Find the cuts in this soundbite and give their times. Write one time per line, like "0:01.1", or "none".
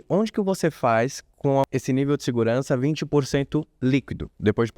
0:01.7